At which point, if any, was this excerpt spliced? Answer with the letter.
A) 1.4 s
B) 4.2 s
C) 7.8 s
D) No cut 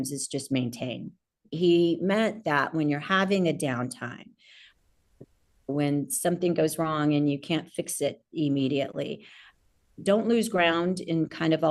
A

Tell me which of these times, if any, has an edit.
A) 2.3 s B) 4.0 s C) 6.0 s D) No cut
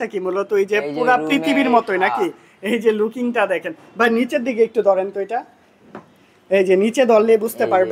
D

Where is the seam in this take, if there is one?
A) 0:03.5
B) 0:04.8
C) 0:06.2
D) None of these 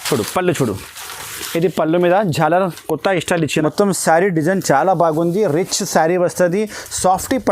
A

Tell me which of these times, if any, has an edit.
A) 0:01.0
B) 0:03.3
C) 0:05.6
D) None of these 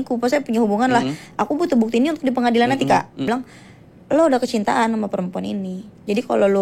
B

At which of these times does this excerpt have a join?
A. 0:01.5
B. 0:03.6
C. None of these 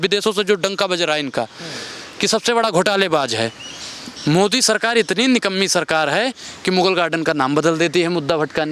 C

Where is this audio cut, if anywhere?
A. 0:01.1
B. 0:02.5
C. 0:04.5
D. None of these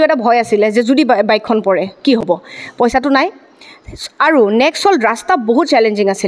D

